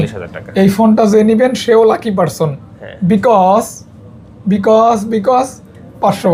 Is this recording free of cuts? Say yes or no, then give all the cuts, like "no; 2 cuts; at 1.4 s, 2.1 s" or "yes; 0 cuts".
yes; 0 cuts